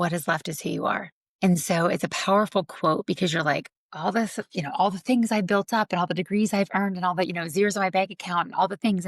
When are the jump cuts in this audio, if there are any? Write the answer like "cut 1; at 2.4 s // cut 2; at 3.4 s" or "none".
cut 1; at 1.2 s